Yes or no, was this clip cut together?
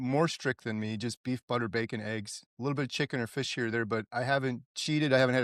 no